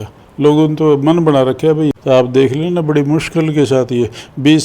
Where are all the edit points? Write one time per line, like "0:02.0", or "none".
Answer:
0:01.9